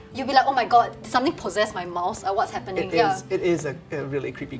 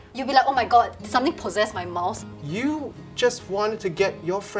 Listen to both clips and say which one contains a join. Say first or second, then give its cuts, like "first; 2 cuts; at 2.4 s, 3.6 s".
second; 1 cut; at 2.2 s